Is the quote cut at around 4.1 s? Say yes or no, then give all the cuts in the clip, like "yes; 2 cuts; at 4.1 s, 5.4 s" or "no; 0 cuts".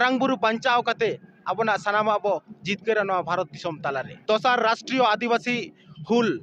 yes; 1 cut; at 4.1 s